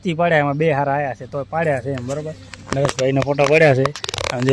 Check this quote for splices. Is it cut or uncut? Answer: uncut